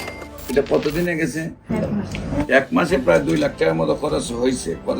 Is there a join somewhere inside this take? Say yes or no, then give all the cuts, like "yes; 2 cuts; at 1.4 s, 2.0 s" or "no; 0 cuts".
yes; 1 cut; at 1.7 s